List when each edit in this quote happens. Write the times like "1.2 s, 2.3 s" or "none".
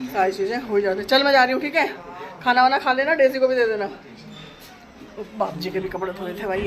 none